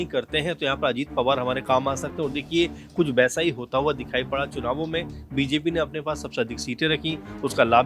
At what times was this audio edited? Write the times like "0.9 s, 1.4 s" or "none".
none